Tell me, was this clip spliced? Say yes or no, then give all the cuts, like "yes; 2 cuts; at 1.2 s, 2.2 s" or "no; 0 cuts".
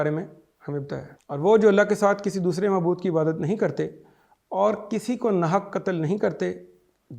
yes; 1 cut; at 1.1 s